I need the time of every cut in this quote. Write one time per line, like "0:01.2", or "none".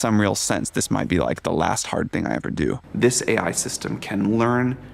0:02.8